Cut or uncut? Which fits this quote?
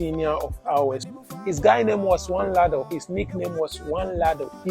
cut